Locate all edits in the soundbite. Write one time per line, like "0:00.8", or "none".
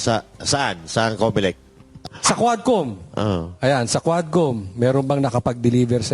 0:01.9